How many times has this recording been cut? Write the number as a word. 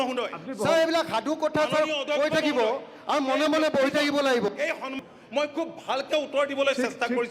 one